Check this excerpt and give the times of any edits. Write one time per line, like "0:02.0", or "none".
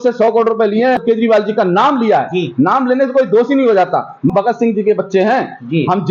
0:01.0
0:04.3